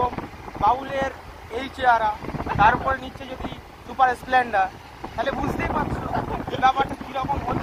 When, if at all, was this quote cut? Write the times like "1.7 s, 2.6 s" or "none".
none